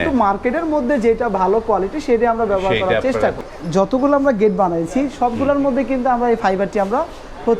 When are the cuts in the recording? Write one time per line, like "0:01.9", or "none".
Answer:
0:03.4